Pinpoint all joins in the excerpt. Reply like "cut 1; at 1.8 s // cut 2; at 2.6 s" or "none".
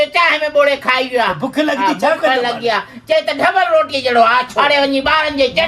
cut 1; at 4.5 s